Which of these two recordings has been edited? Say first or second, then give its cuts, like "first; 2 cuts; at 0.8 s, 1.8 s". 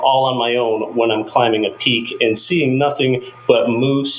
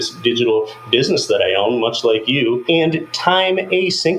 second; 1 cut; at 2.6 s